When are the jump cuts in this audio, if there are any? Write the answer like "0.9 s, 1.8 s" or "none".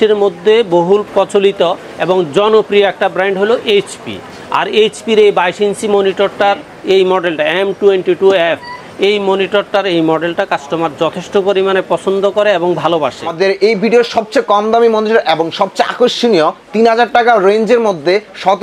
1.1 s, 13.3 s